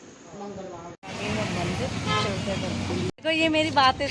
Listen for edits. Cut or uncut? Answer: cut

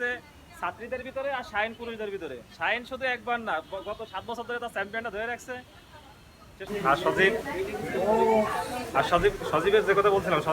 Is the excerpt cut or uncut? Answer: cut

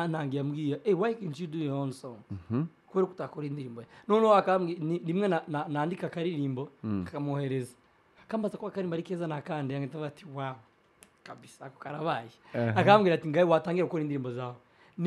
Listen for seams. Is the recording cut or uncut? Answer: uncut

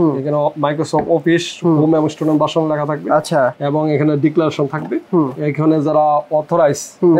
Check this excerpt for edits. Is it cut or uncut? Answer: uncut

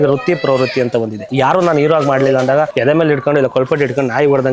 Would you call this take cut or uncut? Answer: cut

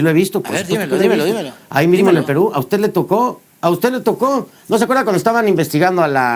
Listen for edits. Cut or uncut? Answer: uncut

